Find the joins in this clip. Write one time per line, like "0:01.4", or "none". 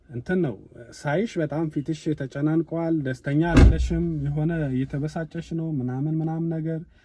none